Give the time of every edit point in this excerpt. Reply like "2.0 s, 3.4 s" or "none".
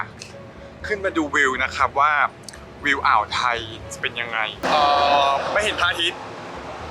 4.6 s

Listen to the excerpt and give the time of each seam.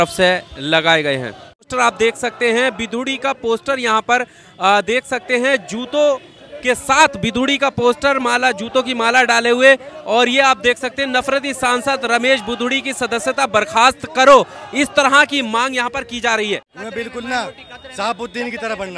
1.7 s, 16.7 s

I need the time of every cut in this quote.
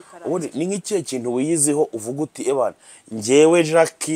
none

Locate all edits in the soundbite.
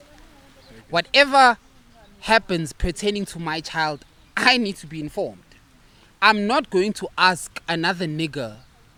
none

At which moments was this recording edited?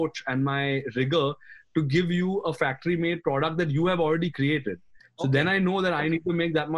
none

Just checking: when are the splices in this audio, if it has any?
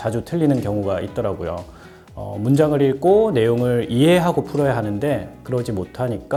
none

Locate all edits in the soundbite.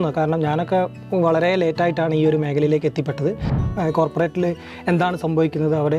3.6 s

